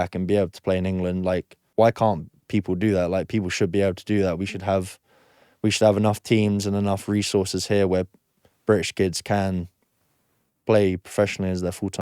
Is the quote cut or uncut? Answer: cut